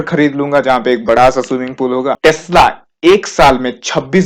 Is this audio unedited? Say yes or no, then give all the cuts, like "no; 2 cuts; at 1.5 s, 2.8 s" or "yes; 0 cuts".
no; 1 cut; at 2.2 s